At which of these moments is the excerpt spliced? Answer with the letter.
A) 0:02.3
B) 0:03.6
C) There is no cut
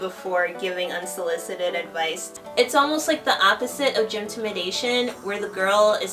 A